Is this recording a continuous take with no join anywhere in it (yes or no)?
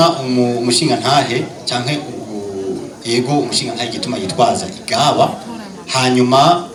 yes